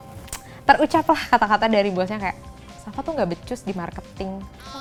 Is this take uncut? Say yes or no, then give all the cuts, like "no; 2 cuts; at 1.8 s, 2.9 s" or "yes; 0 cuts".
yes; 0 cuts